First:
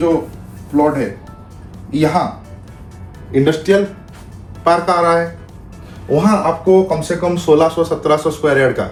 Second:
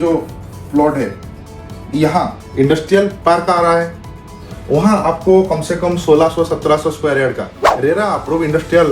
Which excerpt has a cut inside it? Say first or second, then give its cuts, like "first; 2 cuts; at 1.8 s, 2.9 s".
second; 2 cuts; at 2.4 s, 3.2 s